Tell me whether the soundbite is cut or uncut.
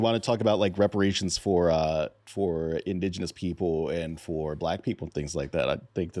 uncut